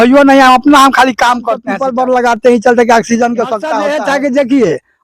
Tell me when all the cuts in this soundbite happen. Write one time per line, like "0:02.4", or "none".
0:01.8
0:03.8